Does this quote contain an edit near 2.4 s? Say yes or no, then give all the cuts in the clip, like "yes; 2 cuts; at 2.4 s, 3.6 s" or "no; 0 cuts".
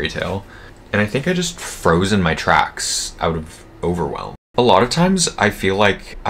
no; 1 cut; at 4.3 s